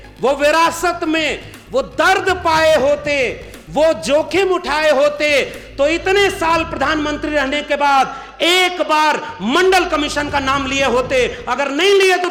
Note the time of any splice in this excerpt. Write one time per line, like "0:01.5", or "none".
none